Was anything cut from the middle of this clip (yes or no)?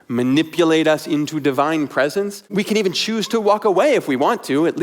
yes